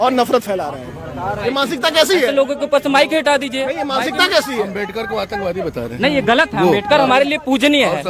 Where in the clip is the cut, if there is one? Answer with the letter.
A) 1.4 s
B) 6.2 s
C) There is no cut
A